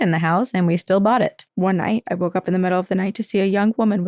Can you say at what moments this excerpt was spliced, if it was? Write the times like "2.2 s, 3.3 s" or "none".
1.4 s

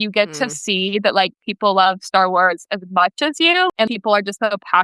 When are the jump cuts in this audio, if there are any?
3.7 s

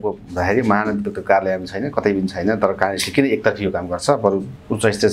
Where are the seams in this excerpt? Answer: none

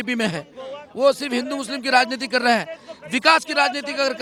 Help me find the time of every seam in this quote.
none

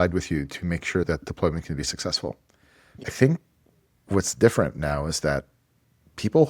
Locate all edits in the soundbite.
1.1 s, 3.0 s

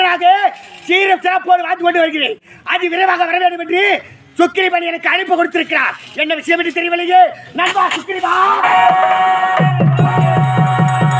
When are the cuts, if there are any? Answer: 8.9 s

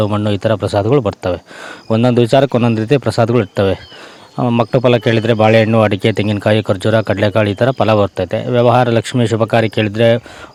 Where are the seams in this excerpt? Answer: none

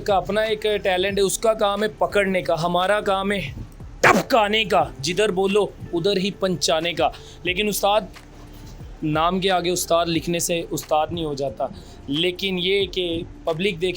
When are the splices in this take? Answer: none

